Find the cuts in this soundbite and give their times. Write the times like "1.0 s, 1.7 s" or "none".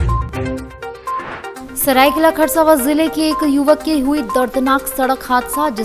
1.5 s